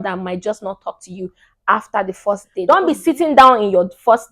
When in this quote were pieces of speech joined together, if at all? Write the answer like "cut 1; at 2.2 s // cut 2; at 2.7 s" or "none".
cut 1; at 2.6 s